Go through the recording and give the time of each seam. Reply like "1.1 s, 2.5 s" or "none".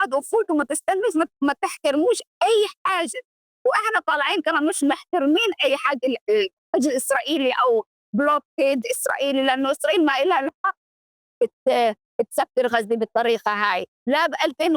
none